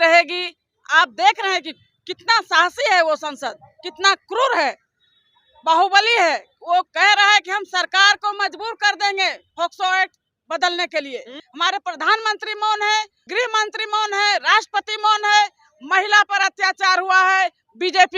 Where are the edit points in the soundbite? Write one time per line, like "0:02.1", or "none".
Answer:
0:11.4
0:13.3